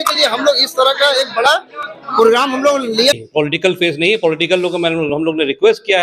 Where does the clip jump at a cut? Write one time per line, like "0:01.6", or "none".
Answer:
0:03.1